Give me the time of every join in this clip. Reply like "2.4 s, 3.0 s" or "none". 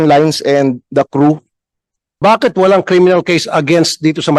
2.2 s